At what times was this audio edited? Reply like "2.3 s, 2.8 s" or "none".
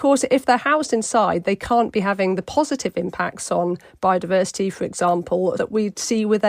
5.6 s